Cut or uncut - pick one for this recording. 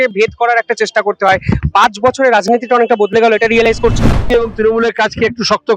cut